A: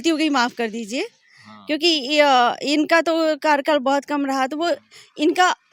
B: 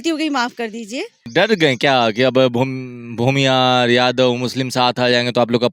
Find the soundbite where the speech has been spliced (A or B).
B